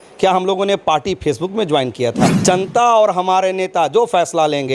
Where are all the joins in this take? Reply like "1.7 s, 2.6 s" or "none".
2.4 s